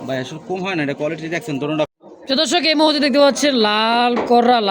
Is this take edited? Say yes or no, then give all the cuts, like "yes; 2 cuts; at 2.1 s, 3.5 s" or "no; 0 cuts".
yes; 1 cut; at 1.9 s